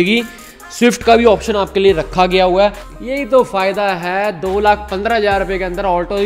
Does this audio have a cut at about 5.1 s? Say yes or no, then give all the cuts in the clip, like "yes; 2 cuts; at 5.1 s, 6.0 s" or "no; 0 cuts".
no; 1 cut; at 2.8 s